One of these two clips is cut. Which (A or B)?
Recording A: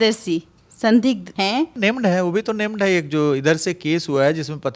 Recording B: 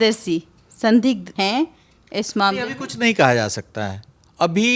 A